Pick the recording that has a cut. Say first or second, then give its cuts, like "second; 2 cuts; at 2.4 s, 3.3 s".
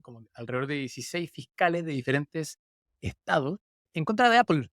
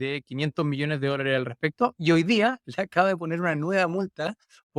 first; 1 cut; at 3.9 s